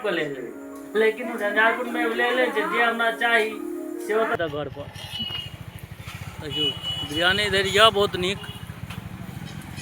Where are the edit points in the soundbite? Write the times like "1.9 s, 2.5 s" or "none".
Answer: 4.4 s